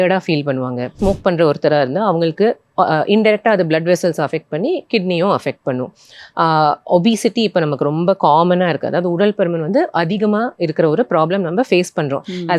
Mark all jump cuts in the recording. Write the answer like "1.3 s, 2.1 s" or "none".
0.9 s